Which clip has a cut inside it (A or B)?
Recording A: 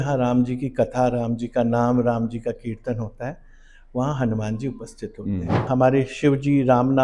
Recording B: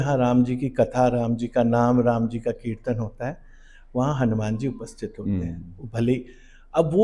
A